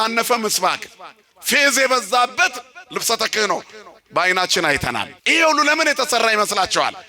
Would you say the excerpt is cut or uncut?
cut